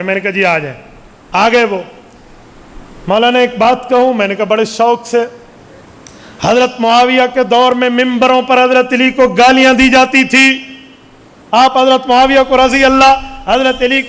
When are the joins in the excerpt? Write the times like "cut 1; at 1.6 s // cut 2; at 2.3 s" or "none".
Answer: none